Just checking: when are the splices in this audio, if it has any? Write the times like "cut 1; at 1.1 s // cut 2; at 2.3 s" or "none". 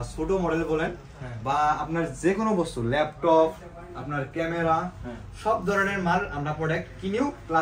none